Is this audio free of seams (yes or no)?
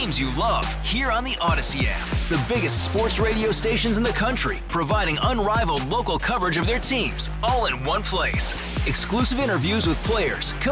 yes